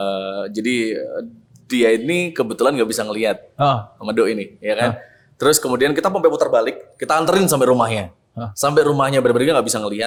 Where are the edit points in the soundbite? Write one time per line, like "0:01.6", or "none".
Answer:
none